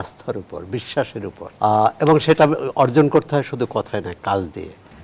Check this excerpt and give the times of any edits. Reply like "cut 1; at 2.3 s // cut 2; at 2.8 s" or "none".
cut 1; at 1.4 s